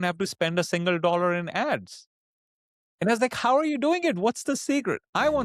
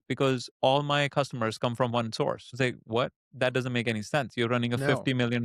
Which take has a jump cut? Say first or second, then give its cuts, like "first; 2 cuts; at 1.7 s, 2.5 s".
second; 1 cut; at 2.5 s